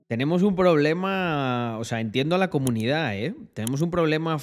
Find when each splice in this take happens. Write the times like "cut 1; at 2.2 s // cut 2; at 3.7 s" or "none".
none